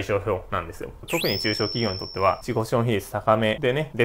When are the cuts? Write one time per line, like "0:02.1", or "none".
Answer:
0:01.0